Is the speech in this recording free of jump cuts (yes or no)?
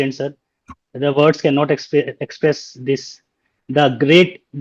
yes